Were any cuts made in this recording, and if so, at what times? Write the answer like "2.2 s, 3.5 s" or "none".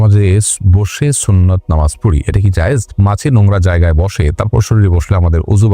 2.9 s